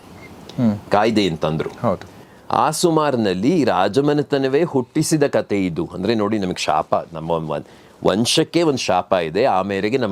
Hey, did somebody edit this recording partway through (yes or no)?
no